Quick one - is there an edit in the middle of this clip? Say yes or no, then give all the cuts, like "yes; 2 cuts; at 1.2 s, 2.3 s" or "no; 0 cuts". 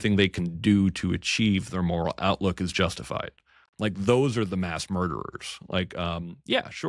no; 0 cuts